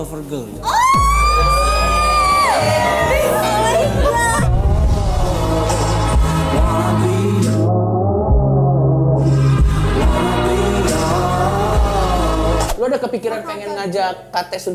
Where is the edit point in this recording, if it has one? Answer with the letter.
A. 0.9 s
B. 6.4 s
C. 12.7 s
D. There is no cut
C